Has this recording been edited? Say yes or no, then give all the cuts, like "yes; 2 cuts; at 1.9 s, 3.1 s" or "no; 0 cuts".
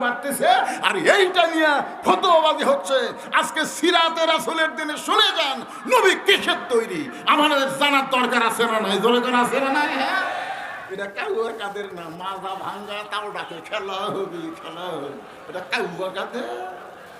yes; 1 cut; at 10.8 s